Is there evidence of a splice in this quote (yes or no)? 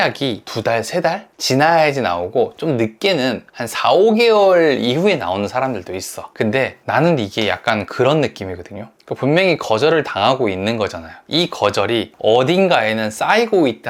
no